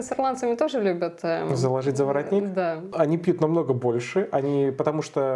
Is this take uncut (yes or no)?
yes